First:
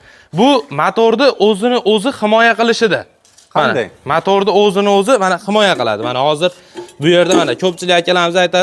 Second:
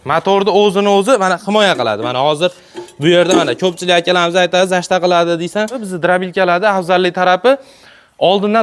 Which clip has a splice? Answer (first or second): second